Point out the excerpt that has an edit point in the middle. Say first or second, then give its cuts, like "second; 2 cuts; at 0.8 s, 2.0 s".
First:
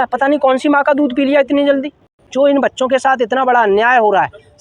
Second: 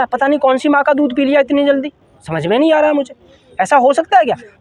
first; 1 cut; at 2.2 s